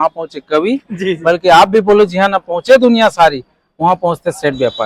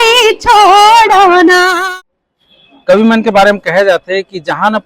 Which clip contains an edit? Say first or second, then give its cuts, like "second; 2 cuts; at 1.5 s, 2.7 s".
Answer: second; 1 cut; at 1.9 s